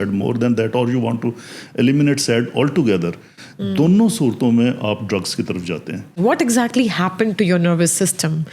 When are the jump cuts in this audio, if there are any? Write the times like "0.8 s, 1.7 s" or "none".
6.2 s